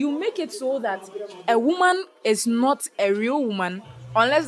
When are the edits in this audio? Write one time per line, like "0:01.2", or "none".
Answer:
none